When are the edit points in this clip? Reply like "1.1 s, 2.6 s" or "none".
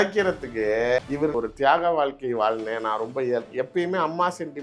1.3 s